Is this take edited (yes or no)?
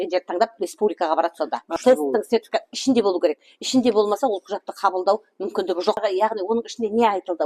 yes